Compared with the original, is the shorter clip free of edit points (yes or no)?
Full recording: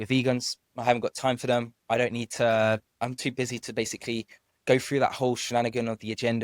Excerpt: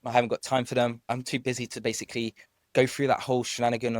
no